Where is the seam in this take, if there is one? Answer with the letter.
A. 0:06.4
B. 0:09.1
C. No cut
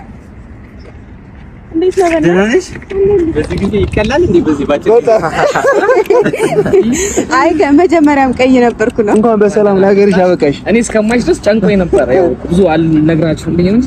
B